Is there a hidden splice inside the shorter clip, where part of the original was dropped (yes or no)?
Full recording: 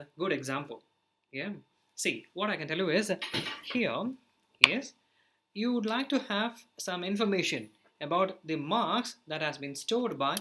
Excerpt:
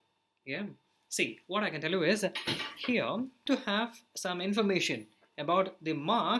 yes